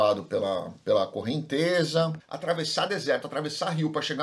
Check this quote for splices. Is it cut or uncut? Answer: cut